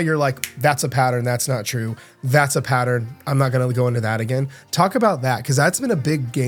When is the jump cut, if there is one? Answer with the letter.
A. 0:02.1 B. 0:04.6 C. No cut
C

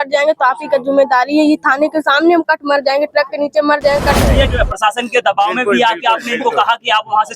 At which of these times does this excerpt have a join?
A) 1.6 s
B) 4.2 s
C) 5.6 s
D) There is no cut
B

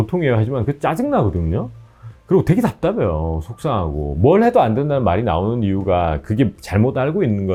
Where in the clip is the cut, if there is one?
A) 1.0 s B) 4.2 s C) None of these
C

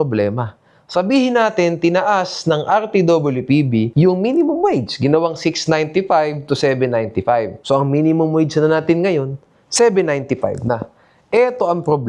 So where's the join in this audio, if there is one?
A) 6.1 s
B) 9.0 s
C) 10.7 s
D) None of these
D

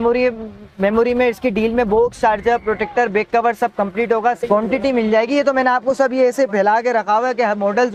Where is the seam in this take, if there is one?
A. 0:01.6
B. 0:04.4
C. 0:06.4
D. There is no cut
B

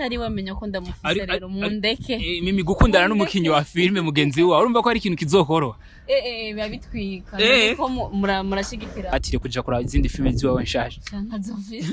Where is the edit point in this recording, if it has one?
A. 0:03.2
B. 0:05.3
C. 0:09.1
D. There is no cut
C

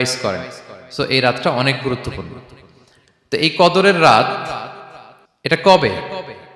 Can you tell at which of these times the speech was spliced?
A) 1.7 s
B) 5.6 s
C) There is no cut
B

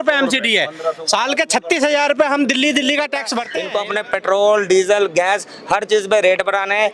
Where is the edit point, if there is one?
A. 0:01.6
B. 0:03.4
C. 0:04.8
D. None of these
B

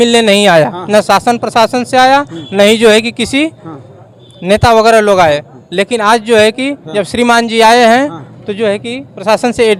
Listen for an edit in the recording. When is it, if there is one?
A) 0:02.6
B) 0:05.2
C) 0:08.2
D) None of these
D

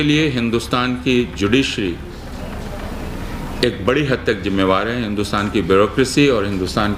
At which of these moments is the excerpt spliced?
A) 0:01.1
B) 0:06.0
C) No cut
C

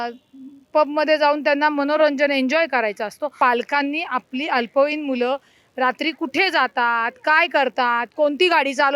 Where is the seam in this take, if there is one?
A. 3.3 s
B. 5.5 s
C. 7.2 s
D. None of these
A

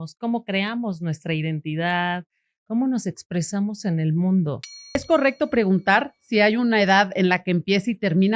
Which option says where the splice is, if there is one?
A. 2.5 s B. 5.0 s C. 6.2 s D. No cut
B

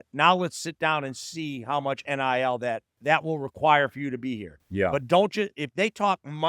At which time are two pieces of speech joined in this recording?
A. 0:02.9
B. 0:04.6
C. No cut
A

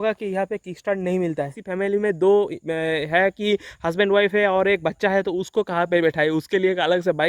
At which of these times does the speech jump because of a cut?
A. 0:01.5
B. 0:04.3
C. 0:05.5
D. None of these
A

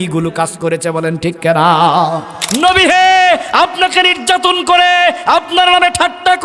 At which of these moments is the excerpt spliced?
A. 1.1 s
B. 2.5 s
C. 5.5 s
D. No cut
B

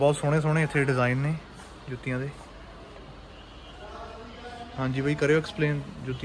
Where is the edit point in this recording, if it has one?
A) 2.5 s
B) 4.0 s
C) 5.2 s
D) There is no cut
D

